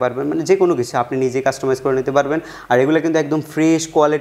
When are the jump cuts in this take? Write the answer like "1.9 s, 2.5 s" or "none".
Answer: none